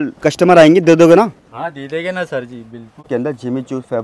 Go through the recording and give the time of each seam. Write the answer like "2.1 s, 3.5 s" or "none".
3.1 s